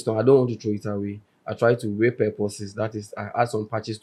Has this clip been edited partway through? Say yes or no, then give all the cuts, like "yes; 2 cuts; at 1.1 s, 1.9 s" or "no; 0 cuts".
no; 0 cuts